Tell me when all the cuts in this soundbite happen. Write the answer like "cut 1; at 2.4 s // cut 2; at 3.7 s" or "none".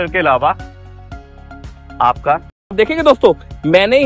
cut 1; at 2.7 s